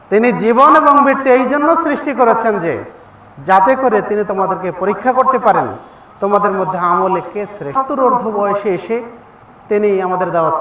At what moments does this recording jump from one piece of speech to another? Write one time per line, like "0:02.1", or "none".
0:07.7